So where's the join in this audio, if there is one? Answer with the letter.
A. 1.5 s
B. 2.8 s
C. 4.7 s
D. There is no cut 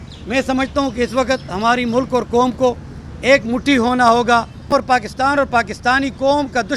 C